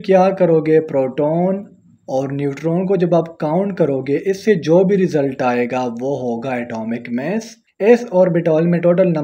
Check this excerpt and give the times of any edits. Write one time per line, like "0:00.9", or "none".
0:07.7